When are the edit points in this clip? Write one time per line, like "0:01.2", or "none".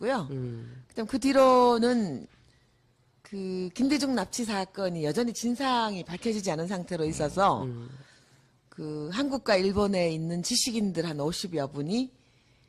0:03.4